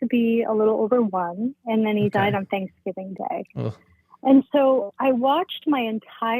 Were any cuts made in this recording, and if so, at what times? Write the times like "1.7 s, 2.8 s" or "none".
none